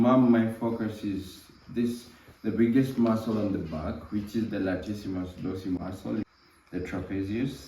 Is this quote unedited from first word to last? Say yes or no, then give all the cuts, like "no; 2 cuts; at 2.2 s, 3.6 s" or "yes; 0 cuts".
no; 1 cut; at 6.3 s